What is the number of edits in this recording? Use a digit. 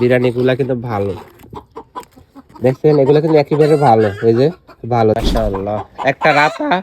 1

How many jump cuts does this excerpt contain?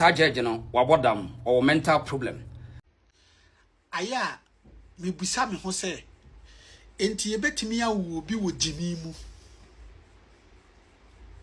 1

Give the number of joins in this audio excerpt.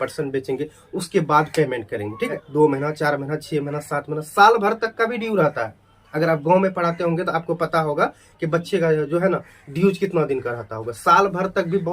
1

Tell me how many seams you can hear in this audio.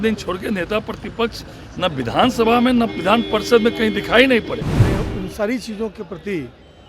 1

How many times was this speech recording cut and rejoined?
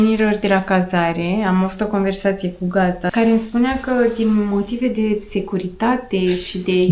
1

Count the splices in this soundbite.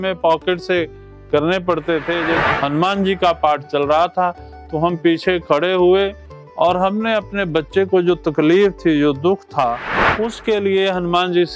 1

